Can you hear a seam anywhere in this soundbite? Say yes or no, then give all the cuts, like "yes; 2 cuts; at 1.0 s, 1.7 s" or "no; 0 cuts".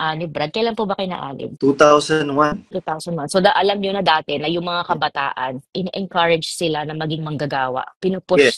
yes; 3 cuts; at 1.4 s, 2.8 s, 5.7 s